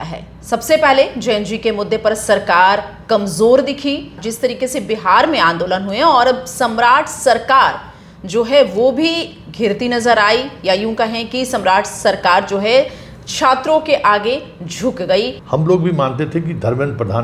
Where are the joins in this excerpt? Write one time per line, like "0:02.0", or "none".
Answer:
0:04.2
0:15.4